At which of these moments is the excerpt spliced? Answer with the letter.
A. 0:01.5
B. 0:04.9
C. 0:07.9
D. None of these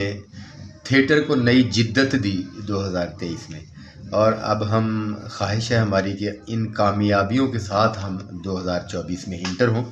D